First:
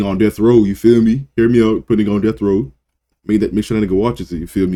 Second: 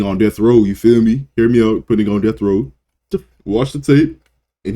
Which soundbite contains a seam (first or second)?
second